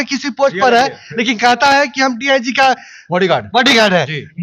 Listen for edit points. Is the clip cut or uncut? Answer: uncut